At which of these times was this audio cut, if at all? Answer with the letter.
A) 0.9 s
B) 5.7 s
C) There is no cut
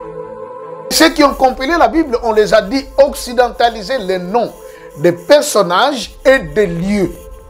A